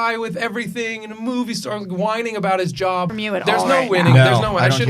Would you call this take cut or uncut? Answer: cut